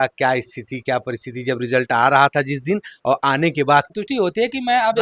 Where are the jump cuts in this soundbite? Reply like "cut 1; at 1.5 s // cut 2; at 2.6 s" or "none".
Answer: cut 1; at 3.9 s

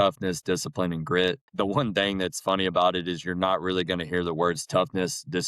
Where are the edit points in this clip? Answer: cut 1; at 1.4 s

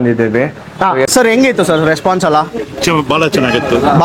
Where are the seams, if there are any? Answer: cut 1; at 1.1 s

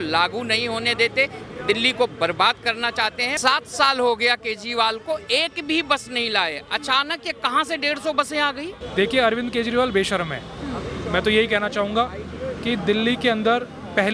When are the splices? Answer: cut 1; at 3.3 s // cut 2; at 8.8 s

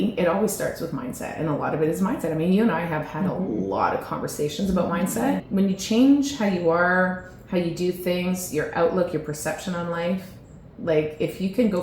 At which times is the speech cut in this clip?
cut 1; at 5.4 s

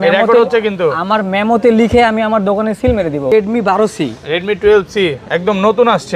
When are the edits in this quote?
cut 1; at 3.3 s

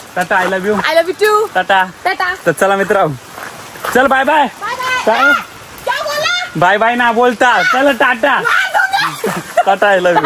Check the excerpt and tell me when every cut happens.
none

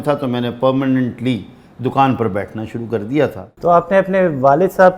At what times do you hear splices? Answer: cut 1; at 3.5 s

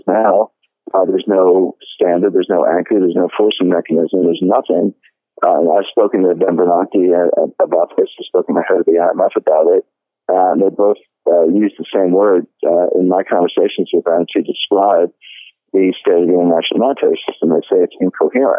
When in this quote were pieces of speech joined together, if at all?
none

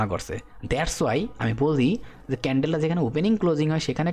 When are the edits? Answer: none

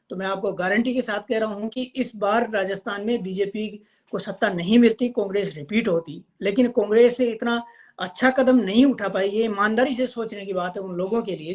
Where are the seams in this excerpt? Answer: none

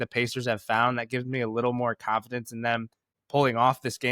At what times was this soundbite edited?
cut 1; at 3.1 s

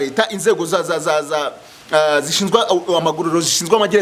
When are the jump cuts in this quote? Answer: none

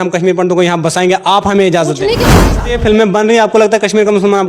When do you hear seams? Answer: cut 1; at 2.2 s

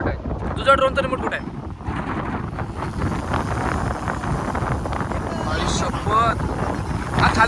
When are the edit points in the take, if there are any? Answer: none

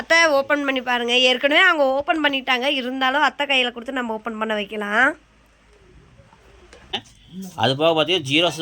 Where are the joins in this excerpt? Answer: cut 1; at 7.0 s

